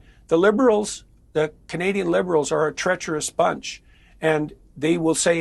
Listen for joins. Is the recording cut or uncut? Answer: uncut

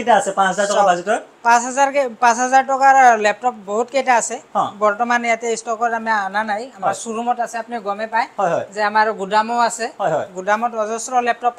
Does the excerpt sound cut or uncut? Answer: uncut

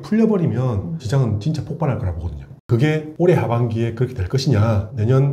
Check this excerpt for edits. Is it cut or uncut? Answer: cut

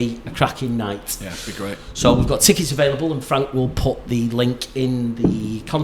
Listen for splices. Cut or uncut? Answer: uncut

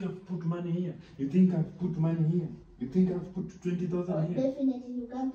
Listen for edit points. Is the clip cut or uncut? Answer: uncut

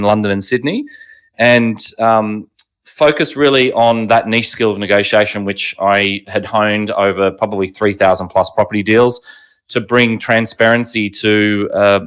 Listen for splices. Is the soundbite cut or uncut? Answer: uncut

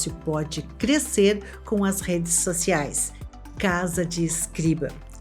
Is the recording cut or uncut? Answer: cut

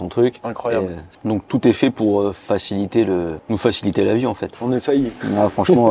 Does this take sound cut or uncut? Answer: cut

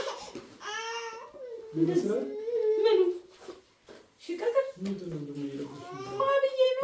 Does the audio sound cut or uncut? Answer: uncut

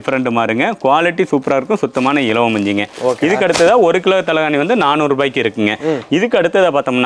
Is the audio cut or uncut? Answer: uncut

